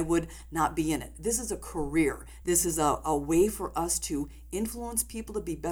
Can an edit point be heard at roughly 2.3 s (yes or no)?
yes